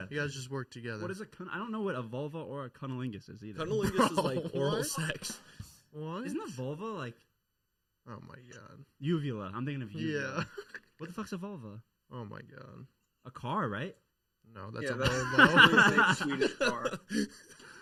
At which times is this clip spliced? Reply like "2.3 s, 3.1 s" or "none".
none

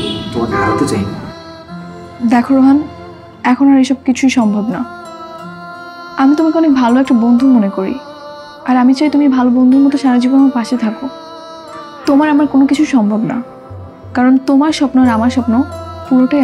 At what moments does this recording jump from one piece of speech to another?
none

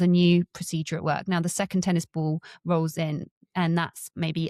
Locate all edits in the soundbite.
none

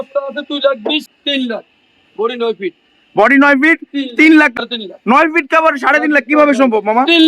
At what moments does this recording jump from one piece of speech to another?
1.1 s, 4.6 s

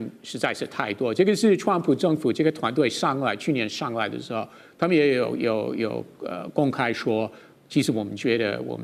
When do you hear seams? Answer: none

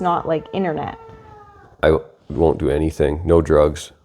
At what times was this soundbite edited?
1.8 s

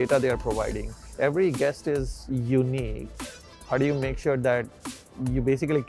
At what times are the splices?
1.0 s

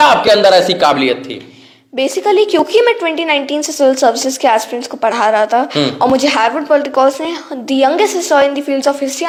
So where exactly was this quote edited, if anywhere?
none

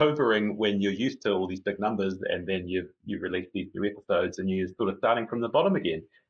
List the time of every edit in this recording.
none

